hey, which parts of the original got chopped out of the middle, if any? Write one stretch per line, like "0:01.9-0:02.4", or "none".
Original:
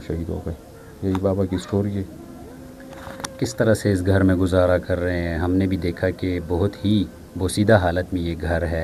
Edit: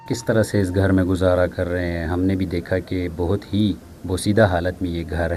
none